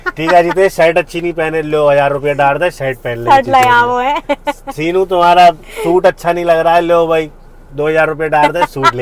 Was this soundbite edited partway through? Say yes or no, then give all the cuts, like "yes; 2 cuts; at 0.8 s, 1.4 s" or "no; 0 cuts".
no; 0 cuts